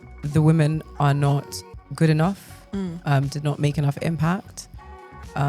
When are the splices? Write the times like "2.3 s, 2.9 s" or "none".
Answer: none